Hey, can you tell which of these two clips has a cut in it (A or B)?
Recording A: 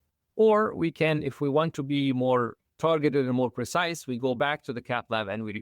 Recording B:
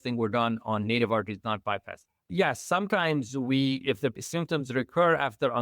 B